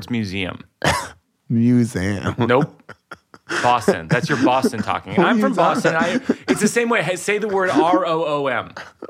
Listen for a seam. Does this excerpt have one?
yes; 1 cut; at 1.3 s

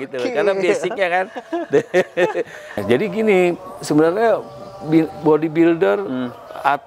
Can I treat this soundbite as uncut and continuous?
no; 1 cut; at 2.8 s

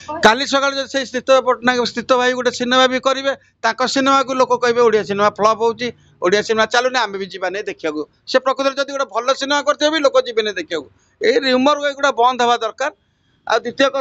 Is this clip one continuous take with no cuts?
yes; 0 cuts

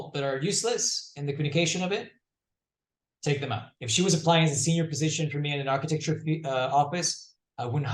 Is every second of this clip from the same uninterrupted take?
no; 1 cut; at 3.7 s

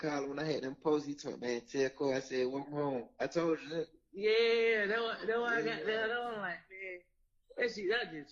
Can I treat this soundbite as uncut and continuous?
yes; 0 cuts

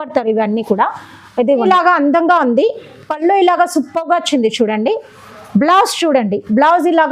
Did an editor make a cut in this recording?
yes; 1 cut; at 1.7 s

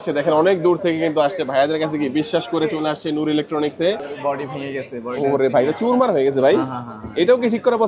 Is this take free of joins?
no; 1 cut; at 4.1 s

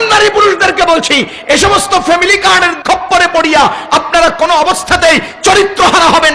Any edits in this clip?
yes; 1 cut; at 2.8 s

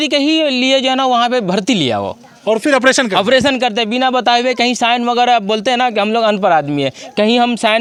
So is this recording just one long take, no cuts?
yes; 0 cuts

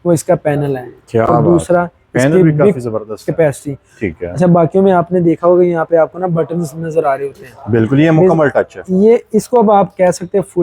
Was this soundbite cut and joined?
no; 0 cuts

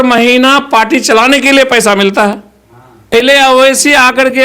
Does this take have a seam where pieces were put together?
yes; 1 cut; at 3.1 s

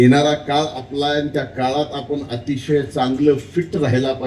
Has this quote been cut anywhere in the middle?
no; 0 cuts

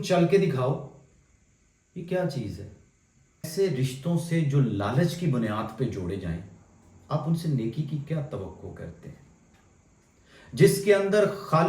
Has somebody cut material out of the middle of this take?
yes; 1 cut; at 3.5 s

